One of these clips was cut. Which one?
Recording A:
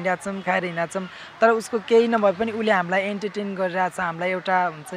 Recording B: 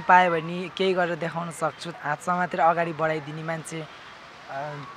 B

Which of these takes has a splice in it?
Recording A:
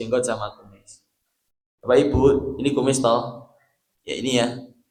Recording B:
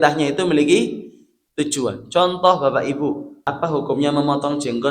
B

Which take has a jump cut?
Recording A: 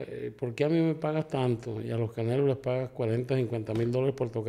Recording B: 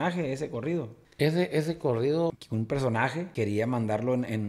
B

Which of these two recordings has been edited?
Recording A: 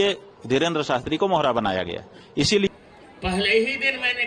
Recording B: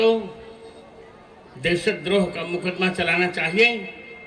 A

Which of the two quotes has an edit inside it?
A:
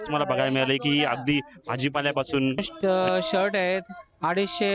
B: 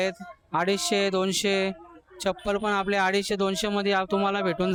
A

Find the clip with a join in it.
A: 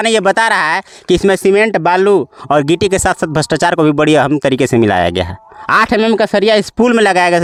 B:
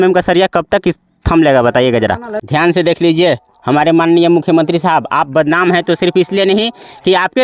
B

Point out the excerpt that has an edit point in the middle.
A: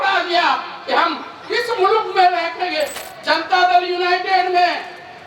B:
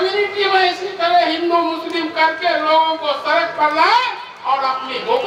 A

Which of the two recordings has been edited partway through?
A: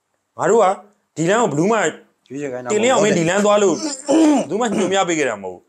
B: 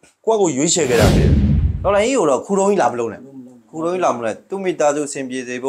B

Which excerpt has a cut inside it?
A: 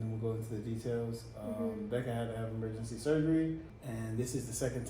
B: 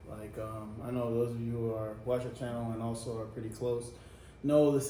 A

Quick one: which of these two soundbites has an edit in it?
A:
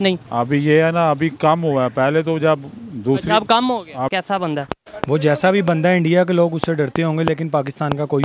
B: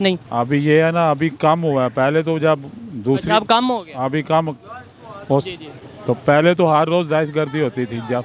A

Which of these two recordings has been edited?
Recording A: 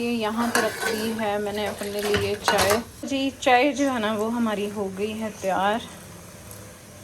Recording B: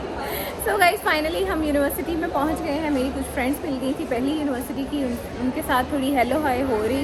A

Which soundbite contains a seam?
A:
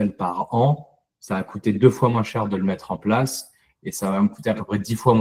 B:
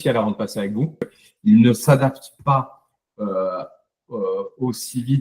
B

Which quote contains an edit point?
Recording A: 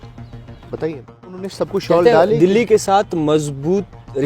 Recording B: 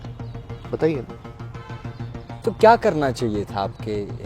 A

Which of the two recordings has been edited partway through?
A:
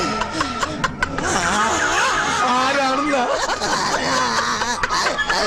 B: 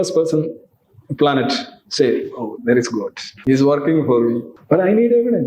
B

